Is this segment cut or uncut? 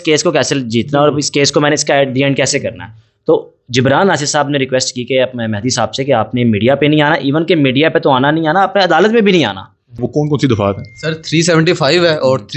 cut